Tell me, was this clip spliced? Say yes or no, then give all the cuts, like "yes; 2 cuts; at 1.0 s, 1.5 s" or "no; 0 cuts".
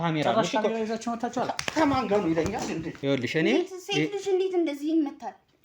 yes; 1 cut; at 2.9 s